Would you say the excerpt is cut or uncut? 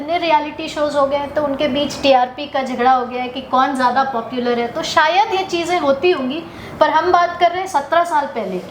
uncut